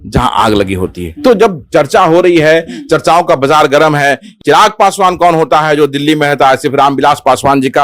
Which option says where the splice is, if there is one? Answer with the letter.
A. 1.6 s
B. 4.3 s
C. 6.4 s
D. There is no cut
B